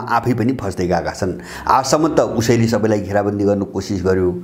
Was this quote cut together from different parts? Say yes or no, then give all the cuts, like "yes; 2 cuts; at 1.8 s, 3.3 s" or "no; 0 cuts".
no; 0 cuts